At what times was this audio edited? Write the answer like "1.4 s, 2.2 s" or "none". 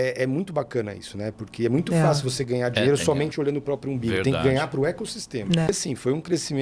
5.7 s